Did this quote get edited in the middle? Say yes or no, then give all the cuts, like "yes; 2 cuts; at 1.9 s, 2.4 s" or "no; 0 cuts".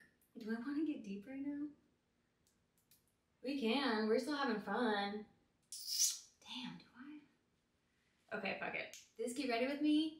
yes; 1 cut; at 9.0 s